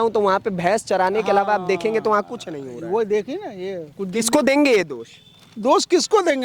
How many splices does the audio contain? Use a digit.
1